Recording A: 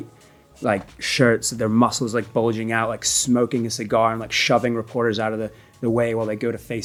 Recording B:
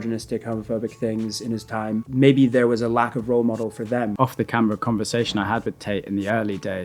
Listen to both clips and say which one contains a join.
B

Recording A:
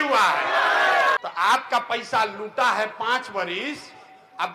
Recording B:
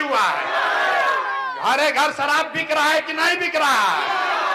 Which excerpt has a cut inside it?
A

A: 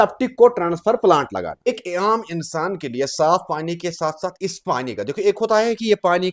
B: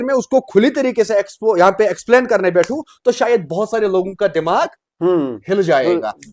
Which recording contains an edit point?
A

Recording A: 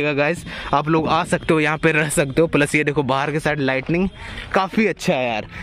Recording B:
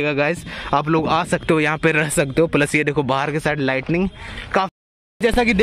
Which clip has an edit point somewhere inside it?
B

